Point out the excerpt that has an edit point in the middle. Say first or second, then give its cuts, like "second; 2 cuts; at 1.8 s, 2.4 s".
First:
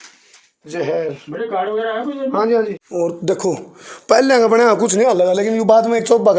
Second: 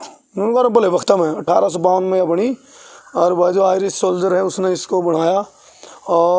first; 1 cut; at 2.8 s